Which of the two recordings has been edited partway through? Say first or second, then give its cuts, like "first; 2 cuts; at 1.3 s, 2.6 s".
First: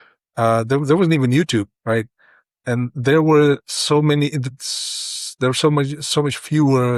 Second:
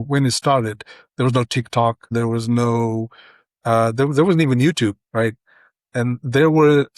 second; 1 cut; at 2.1 s